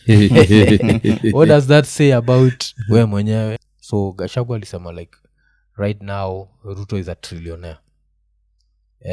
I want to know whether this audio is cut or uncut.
cut